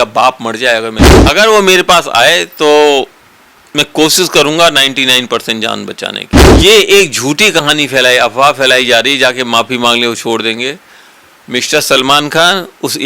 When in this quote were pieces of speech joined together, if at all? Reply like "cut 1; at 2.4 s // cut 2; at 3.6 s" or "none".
cut 1; at 1.0 s // cut 2; at 6.4 s